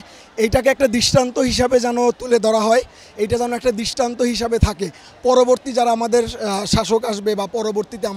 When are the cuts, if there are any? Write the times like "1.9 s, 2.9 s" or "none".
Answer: none